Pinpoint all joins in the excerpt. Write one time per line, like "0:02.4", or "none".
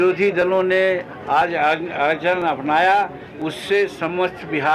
none